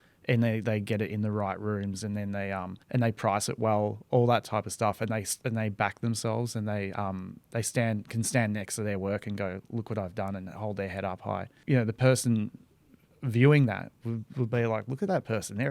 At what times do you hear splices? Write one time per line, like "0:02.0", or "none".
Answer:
0:02.8
0:11.5